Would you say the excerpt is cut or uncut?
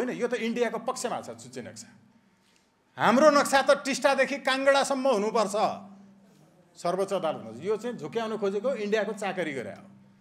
uncut